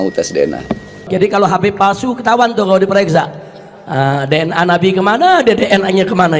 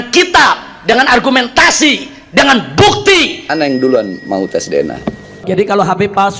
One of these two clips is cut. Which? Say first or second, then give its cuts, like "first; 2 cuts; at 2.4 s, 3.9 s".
second; 1 cut; at 3.4 s